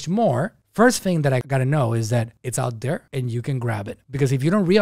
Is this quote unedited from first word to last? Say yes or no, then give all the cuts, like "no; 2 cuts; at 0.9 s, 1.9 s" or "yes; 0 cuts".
yes; 0 cuts